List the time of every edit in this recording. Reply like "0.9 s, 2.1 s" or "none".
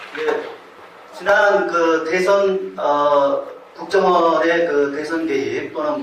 none